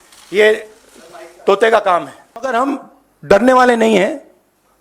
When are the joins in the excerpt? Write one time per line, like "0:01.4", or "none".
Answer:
0:02.5